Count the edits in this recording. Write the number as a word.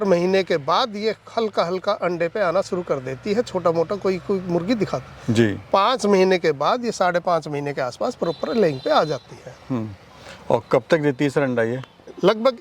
zero